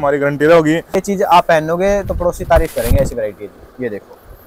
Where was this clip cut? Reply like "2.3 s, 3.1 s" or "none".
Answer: 1.0 s